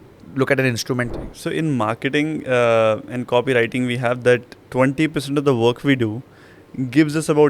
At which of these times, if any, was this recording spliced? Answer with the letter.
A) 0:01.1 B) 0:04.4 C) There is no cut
A